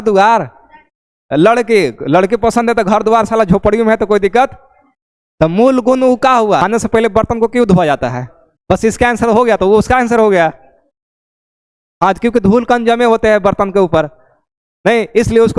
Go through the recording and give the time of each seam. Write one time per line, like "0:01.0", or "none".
0:06.6